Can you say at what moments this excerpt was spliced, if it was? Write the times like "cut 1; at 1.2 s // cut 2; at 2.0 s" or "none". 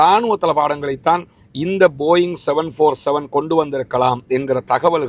none